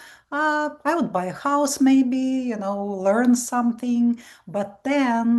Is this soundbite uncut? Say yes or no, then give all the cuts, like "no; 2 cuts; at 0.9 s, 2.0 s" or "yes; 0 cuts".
yes; 0 cuts